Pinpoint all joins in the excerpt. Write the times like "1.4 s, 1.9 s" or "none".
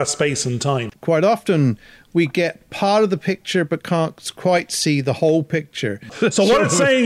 0.9 s, 6.1 s